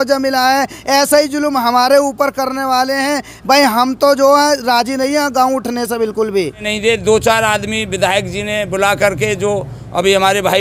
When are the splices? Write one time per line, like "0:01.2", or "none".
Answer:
0:06.7